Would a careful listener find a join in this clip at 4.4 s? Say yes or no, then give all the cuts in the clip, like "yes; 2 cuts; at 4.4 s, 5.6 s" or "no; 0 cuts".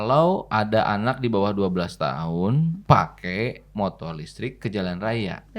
no; 1 cut; at 2.8 s